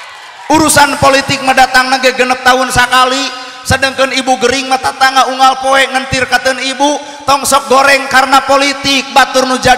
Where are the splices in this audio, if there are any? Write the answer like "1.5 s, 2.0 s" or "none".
none